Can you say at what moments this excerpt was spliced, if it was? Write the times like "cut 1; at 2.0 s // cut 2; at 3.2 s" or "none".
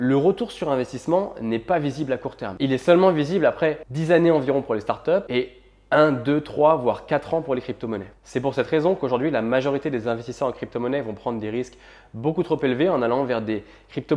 cut 1; at 3.9 s // cut 2; at 5.3 s